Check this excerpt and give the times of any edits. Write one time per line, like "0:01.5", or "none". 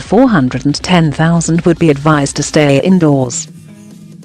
0:03.3